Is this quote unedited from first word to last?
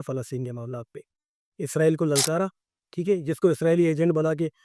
yes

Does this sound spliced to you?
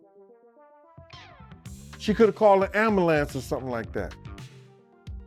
no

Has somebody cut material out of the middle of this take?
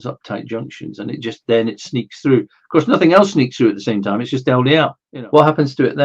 yes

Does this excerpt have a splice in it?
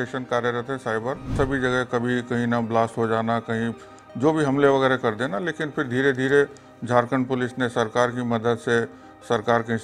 yes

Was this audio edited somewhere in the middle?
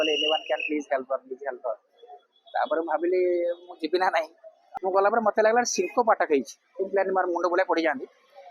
yes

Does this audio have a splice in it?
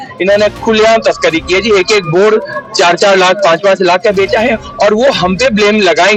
no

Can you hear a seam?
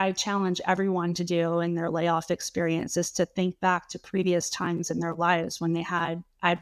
no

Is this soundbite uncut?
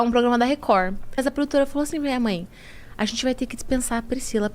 no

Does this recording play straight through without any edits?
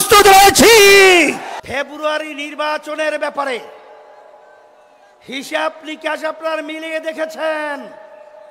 no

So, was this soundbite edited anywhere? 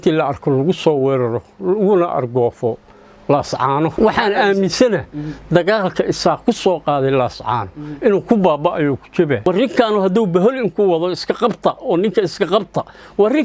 yes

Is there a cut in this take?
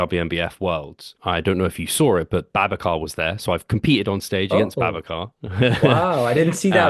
yes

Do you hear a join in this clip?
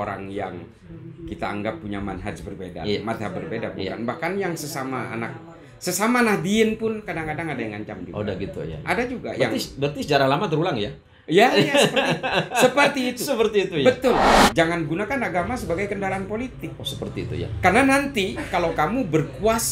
yes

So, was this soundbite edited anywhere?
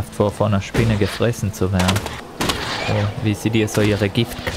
yes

